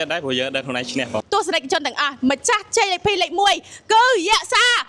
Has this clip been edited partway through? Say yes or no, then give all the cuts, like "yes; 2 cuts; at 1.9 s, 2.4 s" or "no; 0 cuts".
yes; 1 cut; at 1.2 s